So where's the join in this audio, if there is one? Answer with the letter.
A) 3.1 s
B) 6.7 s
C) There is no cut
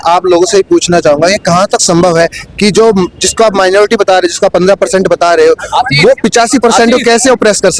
C